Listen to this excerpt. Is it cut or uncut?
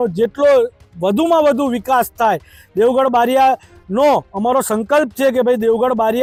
uncut